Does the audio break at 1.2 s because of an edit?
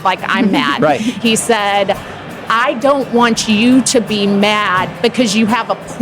yes; 1 cut; at 1.2 s

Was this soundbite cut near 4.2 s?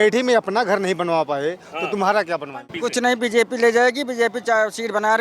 no; 1 cut; at 2.7 s

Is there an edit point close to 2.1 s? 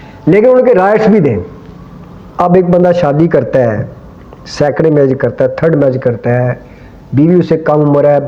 no; 0 cuts

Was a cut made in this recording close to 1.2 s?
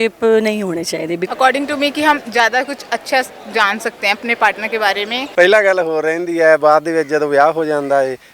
yes; 2 cuts; at 1.2 s, 5.2 s

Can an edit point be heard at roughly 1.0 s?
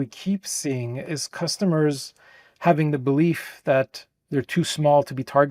yes; 1 cut; at 1.0 s

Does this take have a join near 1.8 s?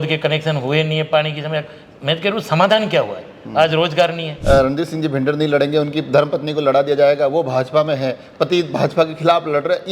no; 1 cut; at 4.3 s

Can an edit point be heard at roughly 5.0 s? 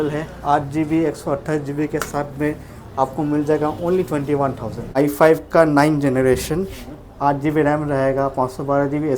yes; 1 cut; at 5.0 s

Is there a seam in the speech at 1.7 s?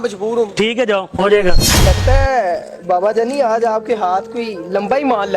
yes; 1 cut; at 1.7 s

